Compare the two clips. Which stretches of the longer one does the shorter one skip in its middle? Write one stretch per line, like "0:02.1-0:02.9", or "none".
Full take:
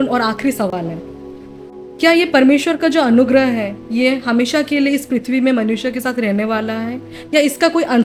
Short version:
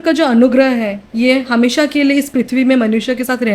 none